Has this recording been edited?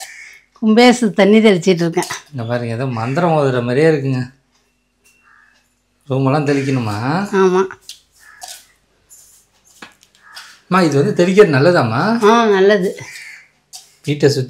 no; 0 cuts

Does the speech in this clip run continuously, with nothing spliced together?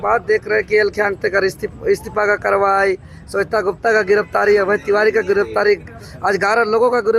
yes; 0 cuts

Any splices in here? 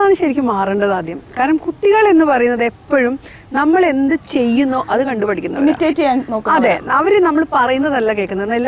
no; 0 cuts

